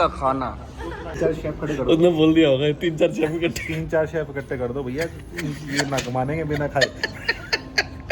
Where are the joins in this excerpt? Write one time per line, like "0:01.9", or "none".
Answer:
0:01.2